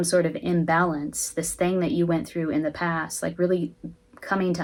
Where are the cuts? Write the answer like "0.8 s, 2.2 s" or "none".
none

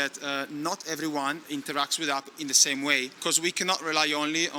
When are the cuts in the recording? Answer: 1.4 s, 3.1 s

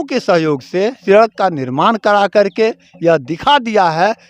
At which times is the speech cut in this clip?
1.0 s

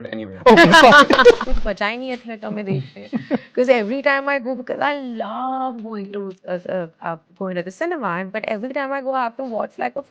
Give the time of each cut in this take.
1.4 s

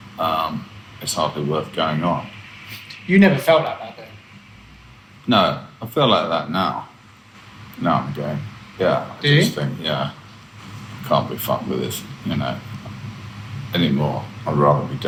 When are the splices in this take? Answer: none

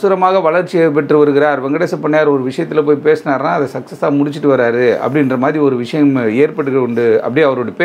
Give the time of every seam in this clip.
none

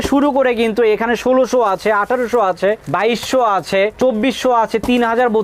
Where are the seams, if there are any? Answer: none

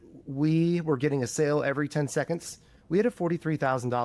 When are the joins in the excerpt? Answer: 2.7 s

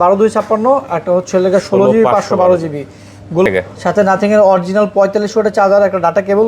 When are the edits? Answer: 3.4 s

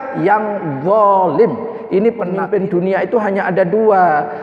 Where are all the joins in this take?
2.3 s

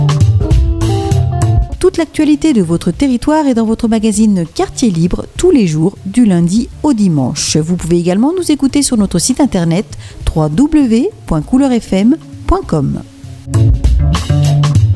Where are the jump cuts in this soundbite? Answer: 13.4 s

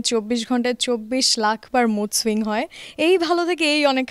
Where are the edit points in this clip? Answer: none

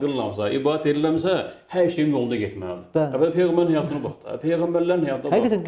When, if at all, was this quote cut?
none

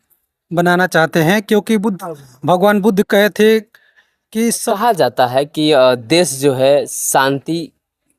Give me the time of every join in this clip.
4.7 s

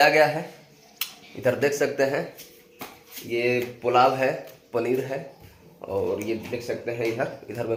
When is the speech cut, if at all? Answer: none

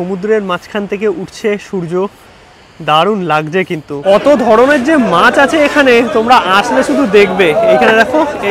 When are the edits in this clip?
4.0 s

